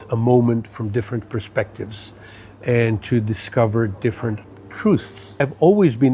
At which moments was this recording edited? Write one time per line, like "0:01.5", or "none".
0:04.4
0:05.4